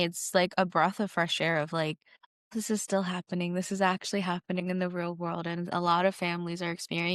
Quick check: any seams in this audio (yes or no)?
no